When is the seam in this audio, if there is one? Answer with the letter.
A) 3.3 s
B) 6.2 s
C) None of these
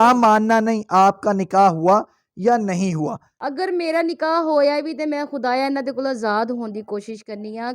A